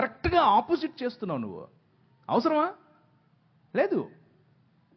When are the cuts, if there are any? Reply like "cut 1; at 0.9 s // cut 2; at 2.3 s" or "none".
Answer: none